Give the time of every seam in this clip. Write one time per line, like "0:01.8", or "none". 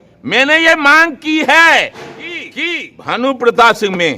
0:02.5